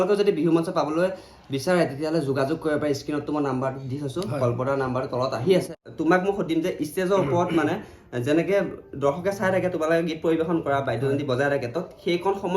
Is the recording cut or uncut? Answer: cut